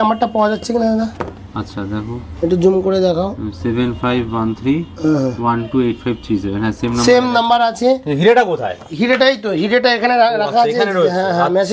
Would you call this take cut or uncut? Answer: uncut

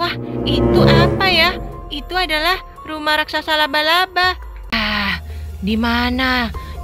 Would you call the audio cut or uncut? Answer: cut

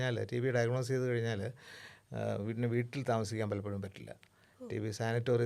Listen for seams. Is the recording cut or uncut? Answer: uncut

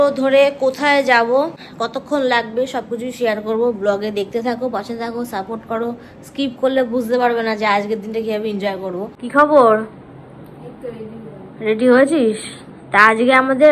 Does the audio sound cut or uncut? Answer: cut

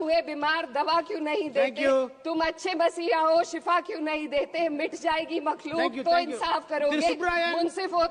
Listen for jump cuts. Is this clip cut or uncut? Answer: uncut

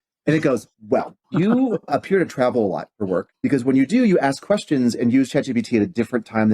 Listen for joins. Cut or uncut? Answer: cut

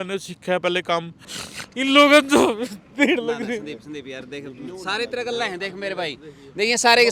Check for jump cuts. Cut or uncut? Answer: cut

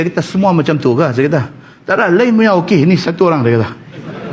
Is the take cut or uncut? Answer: uncut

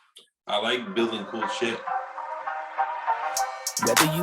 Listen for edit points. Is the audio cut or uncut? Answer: cut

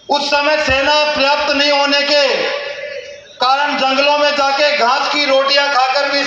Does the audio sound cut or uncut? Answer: uncut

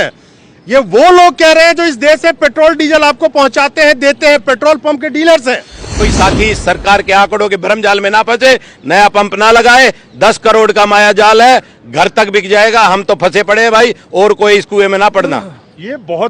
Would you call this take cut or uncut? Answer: cut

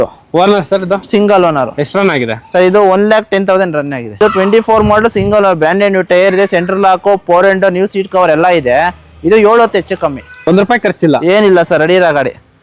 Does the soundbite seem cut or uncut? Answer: cut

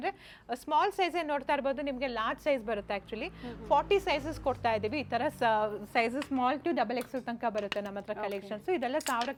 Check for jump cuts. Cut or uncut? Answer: uncut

